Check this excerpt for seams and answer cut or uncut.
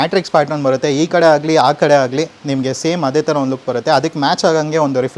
uncut